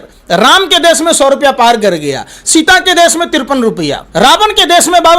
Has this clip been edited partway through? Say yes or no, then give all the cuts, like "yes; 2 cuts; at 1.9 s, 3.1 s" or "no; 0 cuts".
yes; 1 cut; at 4.0 s